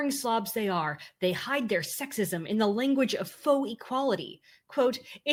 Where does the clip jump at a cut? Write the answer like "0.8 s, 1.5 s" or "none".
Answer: none